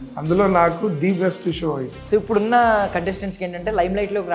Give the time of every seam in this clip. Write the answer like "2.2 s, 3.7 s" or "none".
1.9 s